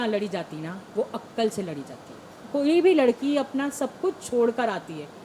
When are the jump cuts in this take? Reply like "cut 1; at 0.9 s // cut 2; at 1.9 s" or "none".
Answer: cut 1; at 2.3 s